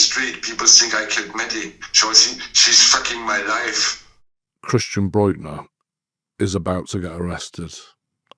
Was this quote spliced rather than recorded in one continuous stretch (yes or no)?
yes